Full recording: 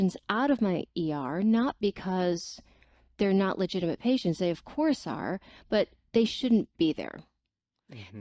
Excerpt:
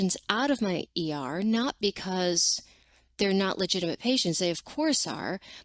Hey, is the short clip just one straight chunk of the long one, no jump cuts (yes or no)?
yes